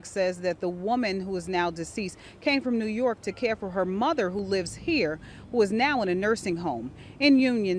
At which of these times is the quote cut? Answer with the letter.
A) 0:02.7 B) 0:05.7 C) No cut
C